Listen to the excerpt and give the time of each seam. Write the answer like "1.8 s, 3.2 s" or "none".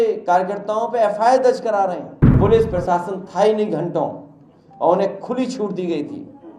2.4 s